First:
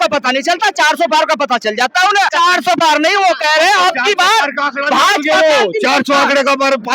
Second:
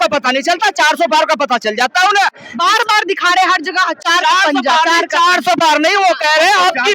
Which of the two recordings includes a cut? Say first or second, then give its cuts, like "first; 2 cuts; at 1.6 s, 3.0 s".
first; 1 cut; at 2.3 s